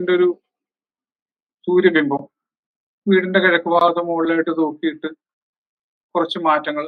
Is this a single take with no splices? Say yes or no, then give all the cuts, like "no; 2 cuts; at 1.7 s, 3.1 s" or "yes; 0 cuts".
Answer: yes; 0 cuts